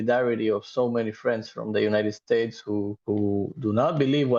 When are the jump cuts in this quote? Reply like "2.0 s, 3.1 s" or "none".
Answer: none